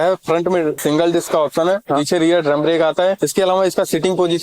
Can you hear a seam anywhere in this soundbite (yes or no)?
yes